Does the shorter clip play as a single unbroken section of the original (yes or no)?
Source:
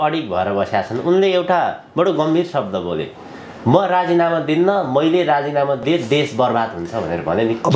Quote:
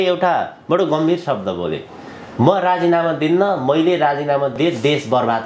yes